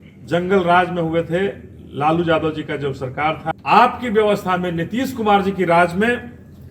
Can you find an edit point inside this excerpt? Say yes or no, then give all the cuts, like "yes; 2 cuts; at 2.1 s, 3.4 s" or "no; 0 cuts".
yes; 1 cut; at 3.5 s